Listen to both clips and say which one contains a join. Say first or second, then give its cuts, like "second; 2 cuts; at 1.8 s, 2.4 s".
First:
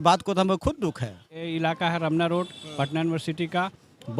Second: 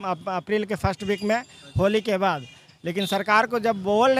first; 1 cut; at 1.4 s